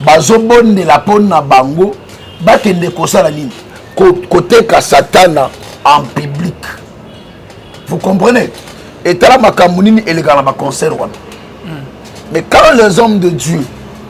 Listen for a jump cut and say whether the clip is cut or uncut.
uncut